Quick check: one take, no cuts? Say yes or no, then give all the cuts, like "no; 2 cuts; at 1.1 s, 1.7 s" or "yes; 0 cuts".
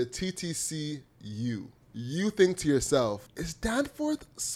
no; 2 cuts; at 1.8 s, 3.3 s